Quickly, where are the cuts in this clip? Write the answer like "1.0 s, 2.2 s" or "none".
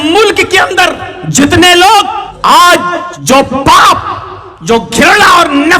1.1 s, 2.3 s, 3.1 s